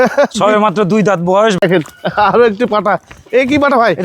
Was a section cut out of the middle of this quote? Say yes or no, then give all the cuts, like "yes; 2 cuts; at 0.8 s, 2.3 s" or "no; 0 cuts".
yes; 1 cut; at 1.6 s